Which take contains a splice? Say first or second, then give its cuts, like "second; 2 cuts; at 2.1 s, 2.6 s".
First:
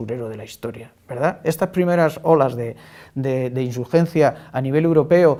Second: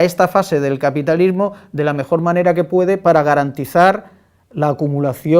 second; 1 cut; at 1.2 s